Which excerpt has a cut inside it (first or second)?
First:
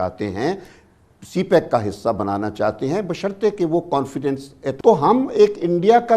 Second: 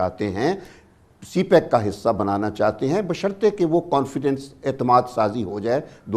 first